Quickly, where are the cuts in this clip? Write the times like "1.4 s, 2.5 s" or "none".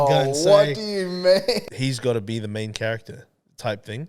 1.6 s